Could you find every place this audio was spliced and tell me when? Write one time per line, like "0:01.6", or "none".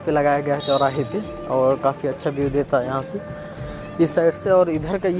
none